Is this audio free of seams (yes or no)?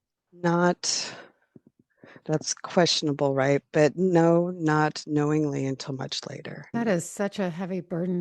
no